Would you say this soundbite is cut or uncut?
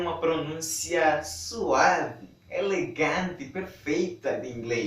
uncut